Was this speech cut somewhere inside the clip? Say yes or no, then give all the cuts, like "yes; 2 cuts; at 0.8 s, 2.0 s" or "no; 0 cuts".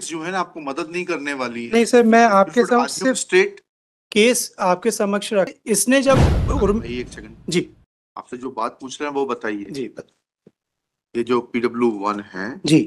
yes; 1 cut; at 5.5 s